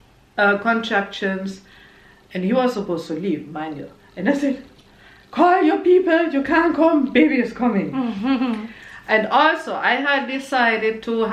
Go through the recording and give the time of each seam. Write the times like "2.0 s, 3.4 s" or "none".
none